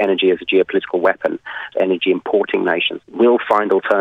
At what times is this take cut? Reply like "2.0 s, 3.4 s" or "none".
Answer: 1.7 s